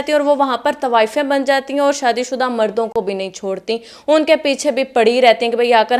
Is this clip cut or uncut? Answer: uncut